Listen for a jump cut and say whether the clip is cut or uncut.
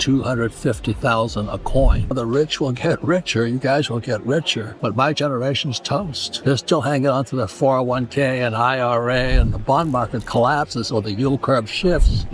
cut